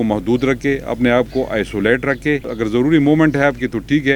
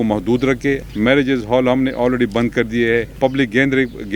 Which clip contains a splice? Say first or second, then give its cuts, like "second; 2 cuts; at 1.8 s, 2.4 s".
second; 2 cuts; at 0.9 s, 3.2 s